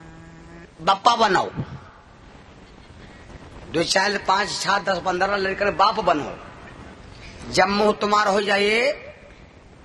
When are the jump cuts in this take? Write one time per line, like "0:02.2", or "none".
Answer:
none